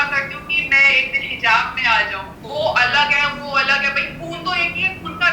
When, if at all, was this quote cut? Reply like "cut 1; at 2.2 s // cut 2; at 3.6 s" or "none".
cut 1; at 2.3 s